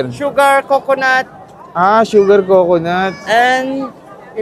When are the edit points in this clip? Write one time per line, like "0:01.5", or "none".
0:03.1